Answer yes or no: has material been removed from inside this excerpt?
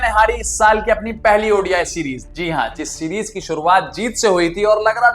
yes